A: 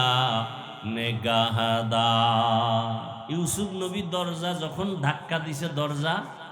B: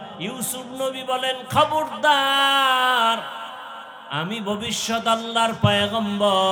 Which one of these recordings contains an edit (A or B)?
A